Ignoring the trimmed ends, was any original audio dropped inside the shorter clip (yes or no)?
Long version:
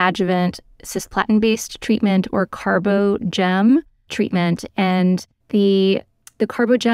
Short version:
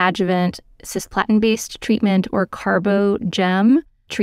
no